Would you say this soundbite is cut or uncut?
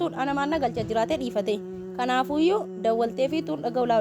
uncut